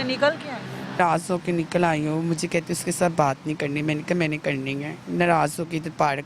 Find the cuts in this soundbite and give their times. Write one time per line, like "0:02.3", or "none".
0:01.0